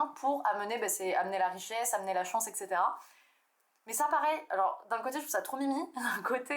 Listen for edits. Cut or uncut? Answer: uncut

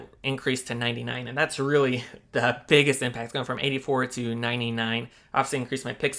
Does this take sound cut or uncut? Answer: uncut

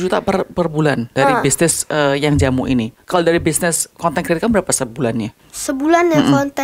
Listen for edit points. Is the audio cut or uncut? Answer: uncut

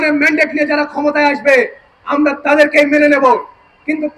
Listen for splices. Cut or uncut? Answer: uncut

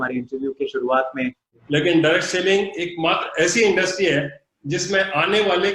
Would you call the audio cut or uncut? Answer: cut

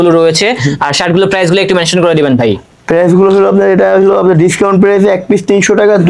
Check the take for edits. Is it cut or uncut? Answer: uncut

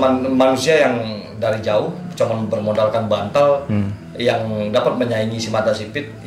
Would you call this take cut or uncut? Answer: uncut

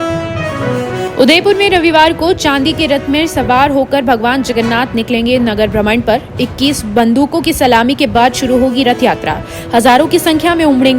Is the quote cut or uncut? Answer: uncut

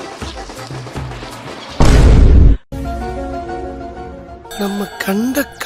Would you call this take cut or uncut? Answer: uncut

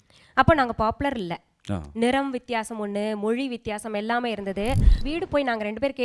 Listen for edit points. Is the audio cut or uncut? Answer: cut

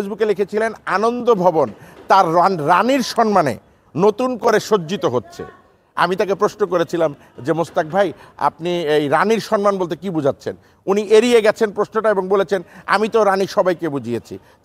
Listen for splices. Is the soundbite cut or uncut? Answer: uncut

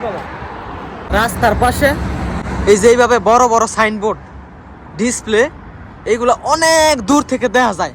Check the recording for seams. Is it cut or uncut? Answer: cut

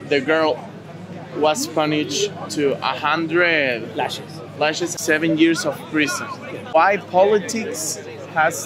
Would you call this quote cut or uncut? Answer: cut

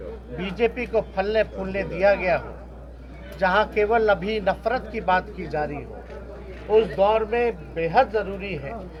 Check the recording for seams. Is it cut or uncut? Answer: uncut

